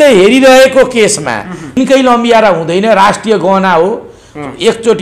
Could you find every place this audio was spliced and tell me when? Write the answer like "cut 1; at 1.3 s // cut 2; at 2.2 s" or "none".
cut 1; at 1.8 s

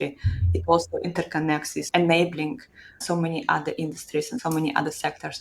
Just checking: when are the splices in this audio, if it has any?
cut 1; at 1.8 s // cut 2; at 3.0 s // cut 3; at 4.4 s

